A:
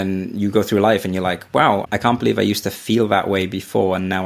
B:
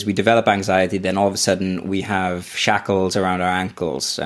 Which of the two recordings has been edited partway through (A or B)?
A